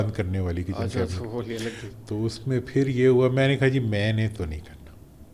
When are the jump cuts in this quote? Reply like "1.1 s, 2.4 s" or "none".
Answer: none